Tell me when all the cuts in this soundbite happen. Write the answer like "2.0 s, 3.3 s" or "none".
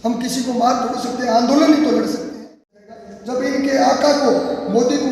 2.8 s